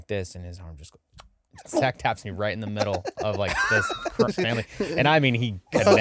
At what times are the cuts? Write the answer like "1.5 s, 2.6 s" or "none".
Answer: 1.6 s

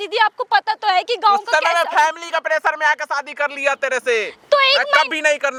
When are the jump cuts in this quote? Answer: none

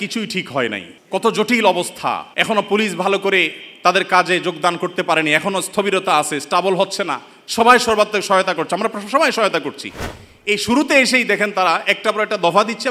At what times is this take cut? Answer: 0.9 s, 2.3 s

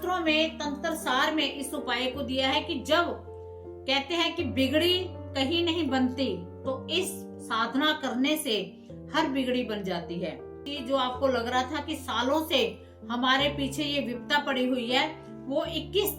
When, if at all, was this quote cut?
10.7 s

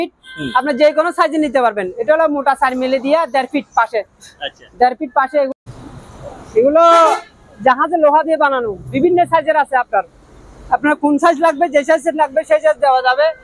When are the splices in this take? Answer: 5.5 s

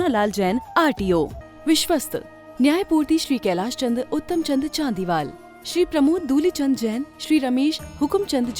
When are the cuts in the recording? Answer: 1.4 s

